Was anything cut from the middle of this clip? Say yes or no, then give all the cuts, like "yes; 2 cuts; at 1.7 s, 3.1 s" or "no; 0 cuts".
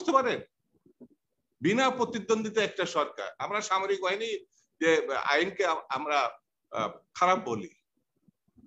no; 0 cuts